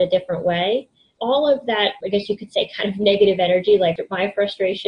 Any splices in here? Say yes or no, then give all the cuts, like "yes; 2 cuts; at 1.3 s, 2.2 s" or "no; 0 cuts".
yes; 3 cuts; at 1.1 s, 2.0 s, 3.9 s